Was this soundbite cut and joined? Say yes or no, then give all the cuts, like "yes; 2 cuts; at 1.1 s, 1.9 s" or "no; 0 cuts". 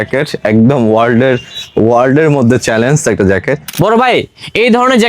yes; 1 cut; at 3.7 s